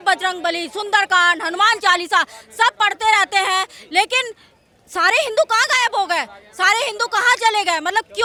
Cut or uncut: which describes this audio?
uncut